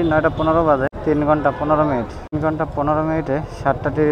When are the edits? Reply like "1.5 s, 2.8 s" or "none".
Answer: 0.9 s